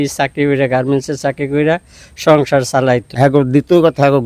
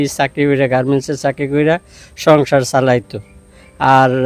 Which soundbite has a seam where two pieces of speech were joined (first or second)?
first